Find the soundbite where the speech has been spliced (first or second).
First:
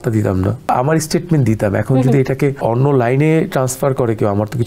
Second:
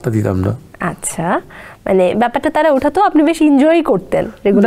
first